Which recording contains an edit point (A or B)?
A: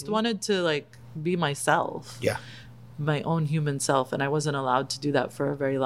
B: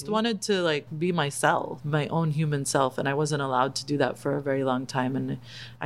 B